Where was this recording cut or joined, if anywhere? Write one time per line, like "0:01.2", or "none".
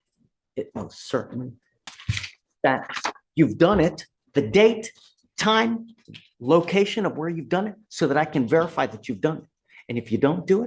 0:01.8